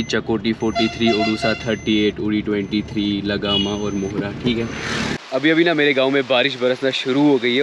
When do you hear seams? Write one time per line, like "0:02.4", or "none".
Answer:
0:05.2